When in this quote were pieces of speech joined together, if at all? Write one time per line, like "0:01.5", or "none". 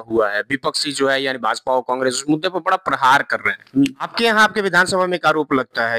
0:04.0